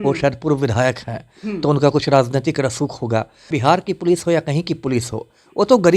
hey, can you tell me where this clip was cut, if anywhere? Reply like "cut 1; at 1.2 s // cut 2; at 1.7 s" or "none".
cut 1; at 3.5 s